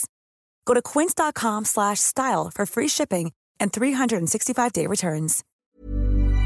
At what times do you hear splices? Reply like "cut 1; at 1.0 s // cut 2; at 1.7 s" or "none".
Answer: cut 1; at 5.4 s